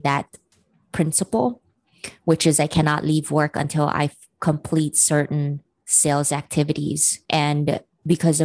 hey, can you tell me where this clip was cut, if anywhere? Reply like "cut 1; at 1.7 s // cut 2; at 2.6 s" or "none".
none